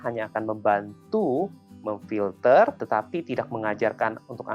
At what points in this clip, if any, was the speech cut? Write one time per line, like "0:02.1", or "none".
0:02.8